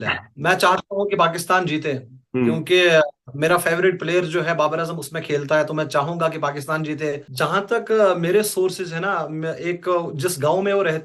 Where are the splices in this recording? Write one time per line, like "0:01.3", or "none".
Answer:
0:07.3

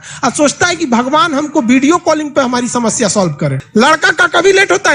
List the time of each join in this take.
0:03.6

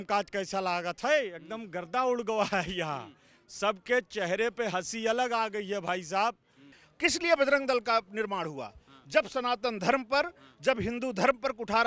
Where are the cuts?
0:06.8

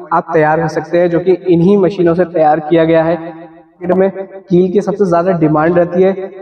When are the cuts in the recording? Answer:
0:03.9

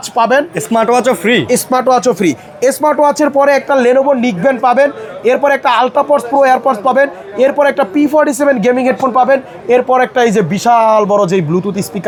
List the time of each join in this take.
none

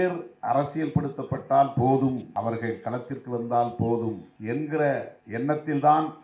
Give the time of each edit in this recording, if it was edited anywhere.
0:02.3
0:04.3
0:05.2

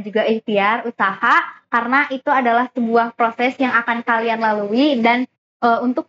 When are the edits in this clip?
none

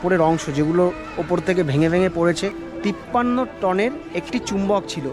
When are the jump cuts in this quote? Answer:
0:02.7

